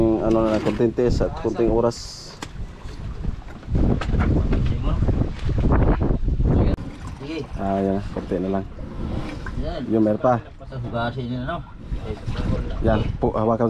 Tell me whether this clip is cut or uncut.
cut